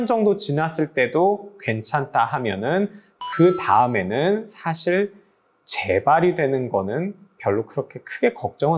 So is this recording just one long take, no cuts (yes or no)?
yes